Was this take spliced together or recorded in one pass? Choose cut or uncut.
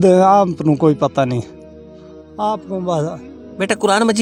uncut